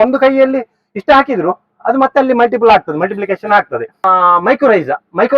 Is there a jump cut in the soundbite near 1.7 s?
no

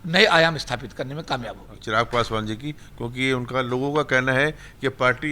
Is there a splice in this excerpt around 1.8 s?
yes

